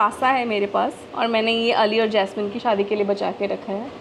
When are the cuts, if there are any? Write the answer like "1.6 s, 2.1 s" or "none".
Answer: 1.0 s, 2.5 s